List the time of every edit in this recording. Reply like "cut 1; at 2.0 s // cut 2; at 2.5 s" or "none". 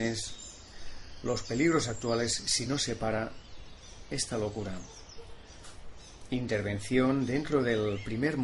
cut 1; at 1.4 s